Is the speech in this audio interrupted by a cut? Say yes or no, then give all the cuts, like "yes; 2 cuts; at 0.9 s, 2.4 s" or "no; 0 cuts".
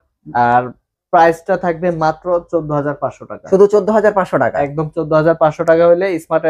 no; 0 cuts